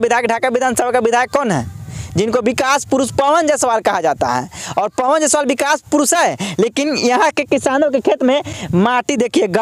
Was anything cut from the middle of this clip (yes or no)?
no